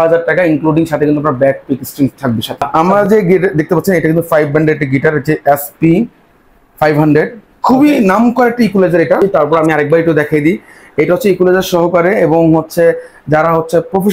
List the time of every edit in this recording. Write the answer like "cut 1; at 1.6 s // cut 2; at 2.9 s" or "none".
cut 1; at 2.7 s // cut 2; at 9.2 s